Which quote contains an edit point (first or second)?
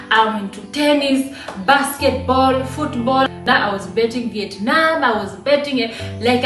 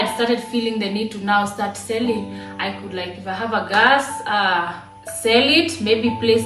first